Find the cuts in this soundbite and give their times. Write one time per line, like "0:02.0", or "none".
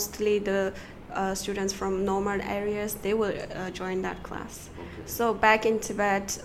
none